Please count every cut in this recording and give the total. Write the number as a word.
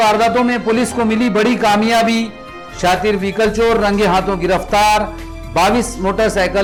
zero